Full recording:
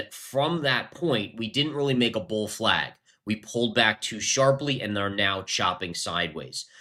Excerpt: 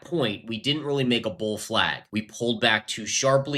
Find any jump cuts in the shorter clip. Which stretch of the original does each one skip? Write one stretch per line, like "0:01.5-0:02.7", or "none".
0:02.9-0:03.1